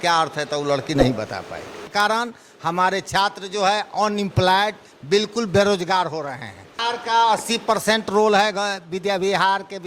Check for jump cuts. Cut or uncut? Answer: cut